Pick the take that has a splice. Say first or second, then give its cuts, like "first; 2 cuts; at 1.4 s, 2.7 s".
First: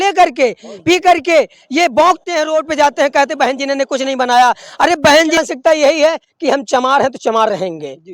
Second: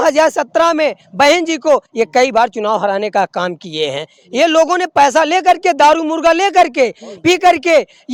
first; 1 cut; at 5.4 s